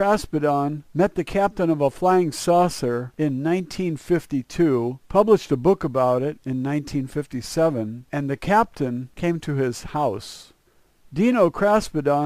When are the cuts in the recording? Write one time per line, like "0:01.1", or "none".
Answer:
none